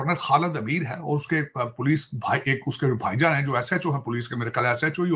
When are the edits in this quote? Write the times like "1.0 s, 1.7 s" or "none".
none

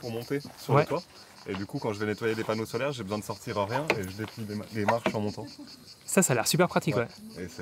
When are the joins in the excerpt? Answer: none

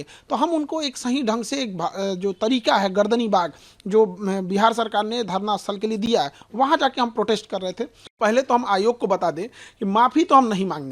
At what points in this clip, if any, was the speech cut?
8.0 s

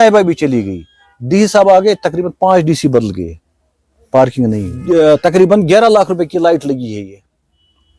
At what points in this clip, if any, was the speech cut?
4.7 s

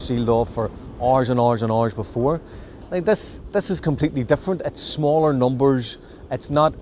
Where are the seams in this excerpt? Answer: none

